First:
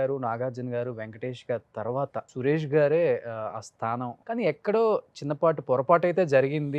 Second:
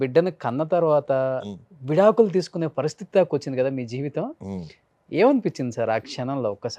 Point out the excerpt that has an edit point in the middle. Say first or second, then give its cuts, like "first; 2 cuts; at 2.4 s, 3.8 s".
first; 2 cuts; at 2.3 s, 4.2 s